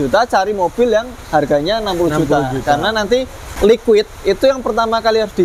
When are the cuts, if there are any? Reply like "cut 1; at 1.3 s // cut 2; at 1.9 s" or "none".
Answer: cut 1; at 3.4 s